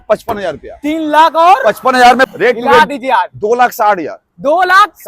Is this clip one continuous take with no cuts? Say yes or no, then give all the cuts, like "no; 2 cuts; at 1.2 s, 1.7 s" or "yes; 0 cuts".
no; 1 cut; at 2.3 s